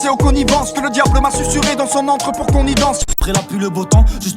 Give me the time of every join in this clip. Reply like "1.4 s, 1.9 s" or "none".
3.1 s